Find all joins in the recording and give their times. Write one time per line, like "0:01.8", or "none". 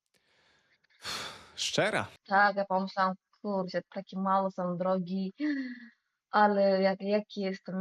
0:02.2